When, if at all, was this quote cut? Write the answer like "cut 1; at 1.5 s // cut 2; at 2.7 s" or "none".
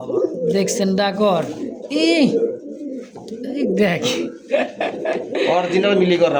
none